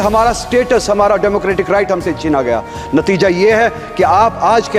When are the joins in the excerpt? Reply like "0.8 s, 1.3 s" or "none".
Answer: none